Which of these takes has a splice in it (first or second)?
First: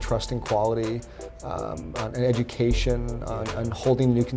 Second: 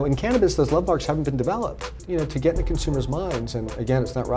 second